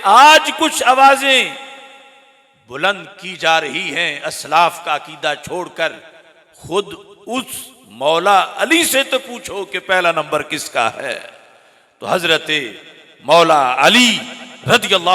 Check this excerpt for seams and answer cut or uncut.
uncut